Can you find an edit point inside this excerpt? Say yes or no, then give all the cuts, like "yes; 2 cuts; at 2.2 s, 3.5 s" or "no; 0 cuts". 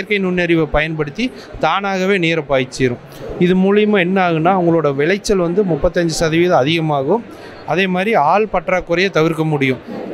no; 0 cuts